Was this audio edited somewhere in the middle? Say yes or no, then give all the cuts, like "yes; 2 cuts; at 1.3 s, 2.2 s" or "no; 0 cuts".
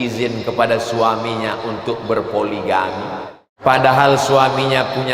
yes; 1 cut; at 3.5 s